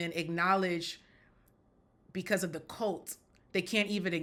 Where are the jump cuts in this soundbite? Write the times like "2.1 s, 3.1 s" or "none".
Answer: none